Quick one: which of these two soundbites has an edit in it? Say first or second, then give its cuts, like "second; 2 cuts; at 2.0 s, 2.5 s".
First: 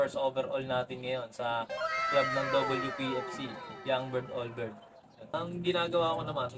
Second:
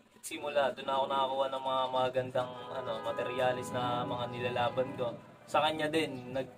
first; 1 cut; at 5.2 s